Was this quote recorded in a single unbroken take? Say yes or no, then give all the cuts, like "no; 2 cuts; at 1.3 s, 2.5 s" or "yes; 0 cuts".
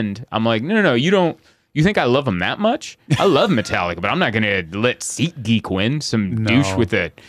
yes; 0 cuts